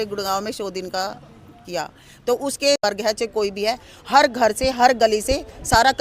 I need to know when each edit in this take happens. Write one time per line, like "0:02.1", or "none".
0:02.8